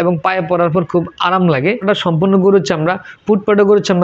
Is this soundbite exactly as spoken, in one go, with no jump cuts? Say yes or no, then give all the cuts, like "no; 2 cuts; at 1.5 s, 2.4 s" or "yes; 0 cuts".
no; 1 cut; at 1.8 s